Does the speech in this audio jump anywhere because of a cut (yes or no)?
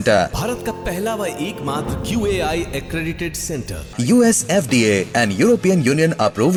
no